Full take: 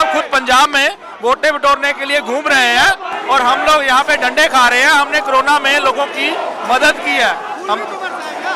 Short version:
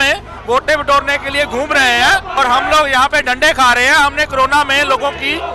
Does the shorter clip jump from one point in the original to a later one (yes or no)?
yes